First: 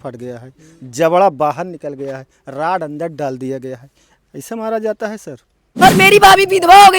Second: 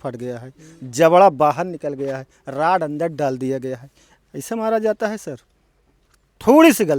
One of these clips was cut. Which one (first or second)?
first